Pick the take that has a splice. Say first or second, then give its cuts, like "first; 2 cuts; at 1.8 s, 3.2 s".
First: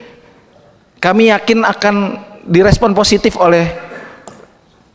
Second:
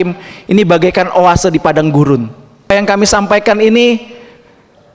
second; 1 cut; at 2.7 s